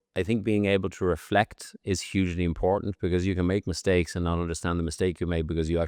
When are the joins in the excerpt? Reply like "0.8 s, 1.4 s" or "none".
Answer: none